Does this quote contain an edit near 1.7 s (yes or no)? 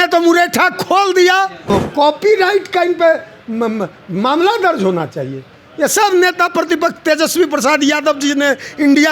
yes